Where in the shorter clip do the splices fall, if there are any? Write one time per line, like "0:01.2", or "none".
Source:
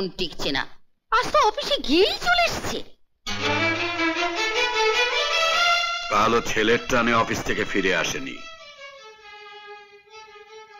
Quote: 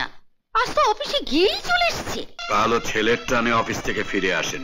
0:02.3